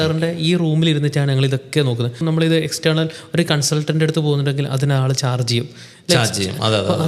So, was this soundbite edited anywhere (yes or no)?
yes